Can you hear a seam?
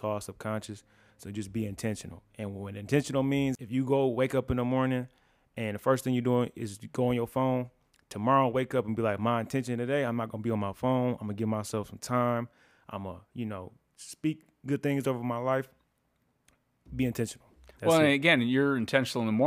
yes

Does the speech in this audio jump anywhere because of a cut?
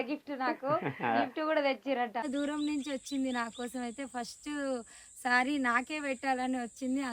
yes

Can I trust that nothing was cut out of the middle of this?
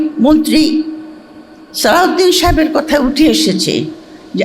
yes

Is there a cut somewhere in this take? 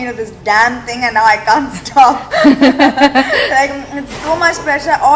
no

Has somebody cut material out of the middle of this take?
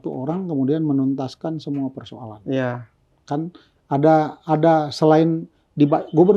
no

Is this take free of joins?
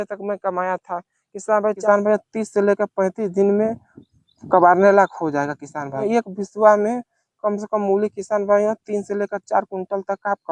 no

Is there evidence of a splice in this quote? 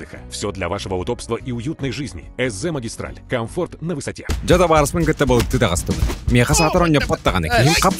yes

